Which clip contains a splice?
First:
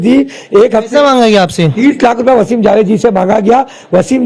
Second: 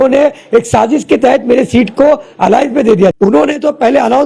second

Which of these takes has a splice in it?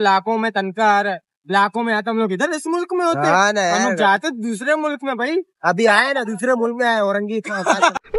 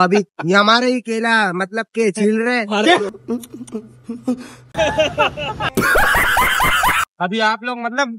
second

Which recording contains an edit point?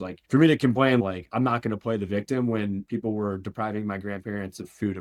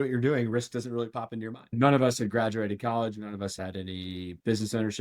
second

